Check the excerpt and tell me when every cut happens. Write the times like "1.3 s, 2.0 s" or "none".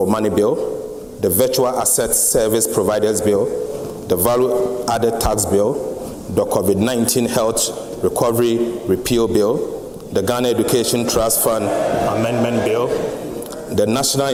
none